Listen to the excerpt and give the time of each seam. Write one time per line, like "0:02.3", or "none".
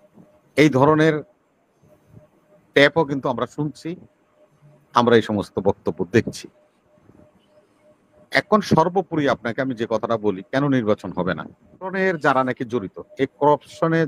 0:11.9